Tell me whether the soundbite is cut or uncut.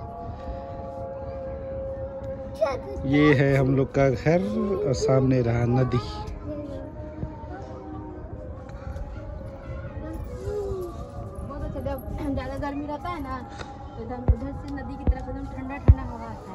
uncut